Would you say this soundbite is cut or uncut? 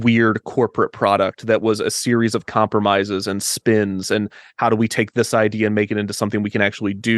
uncut